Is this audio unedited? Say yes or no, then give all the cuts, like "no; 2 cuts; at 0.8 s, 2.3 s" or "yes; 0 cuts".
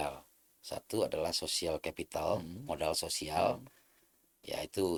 yes; 0 cuts